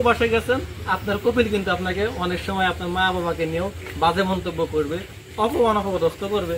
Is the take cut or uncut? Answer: cut